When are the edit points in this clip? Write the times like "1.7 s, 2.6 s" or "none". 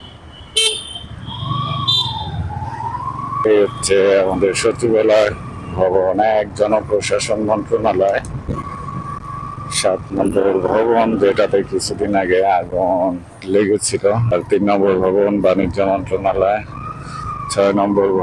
3.5 s, 8.5 s, 14.3 s